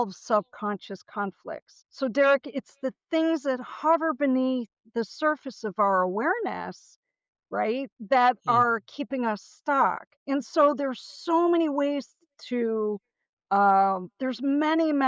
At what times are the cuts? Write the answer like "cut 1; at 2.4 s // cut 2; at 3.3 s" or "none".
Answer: cut 1; at 1.8 s // cut 2; at 10.1 s